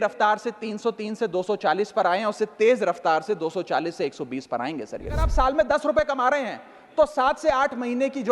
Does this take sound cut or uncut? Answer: cut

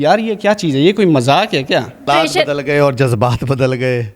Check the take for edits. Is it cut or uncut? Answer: cut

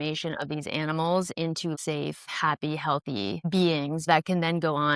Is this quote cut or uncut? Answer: cut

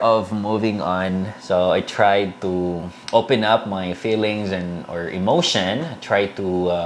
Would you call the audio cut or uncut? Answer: uncut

